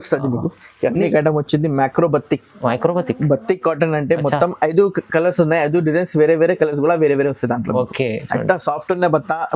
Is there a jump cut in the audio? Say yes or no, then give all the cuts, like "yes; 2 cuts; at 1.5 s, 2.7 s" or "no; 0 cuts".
yes; 1 cut; at 1.0 s